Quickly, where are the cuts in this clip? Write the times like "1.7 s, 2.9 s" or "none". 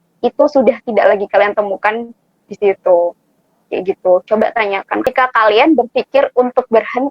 5.1 s